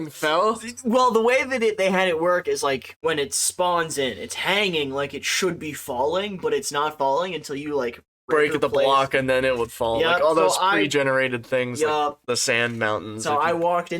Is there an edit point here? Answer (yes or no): yes